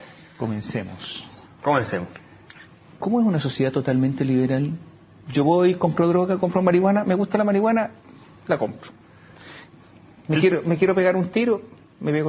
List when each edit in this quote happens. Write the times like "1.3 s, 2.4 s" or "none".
11.3 s

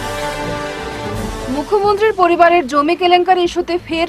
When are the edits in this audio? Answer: 1.1 s

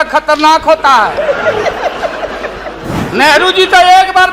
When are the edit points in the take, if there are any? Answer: 2.9 s

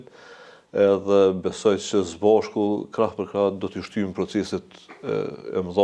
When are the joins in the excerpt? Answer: none

